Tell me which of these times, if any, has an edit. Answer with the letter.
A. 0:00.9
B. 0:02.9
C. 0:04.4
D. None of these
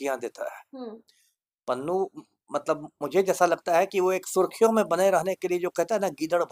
D